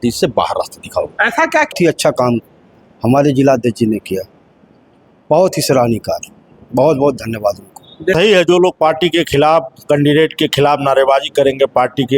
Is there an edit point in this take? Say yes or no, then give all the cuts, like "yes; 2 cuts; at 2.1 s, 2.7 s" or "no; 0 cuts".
yes; 2 cuts; at 1.7 s, 8.1 s